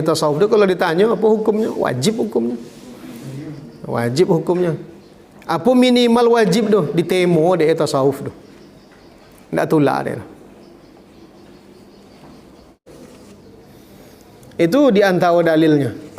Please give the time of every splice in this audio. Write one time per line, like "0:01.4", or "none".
0:12.9